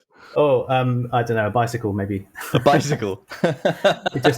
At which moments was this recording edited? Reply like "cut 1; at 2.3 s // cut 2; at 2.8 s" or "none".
none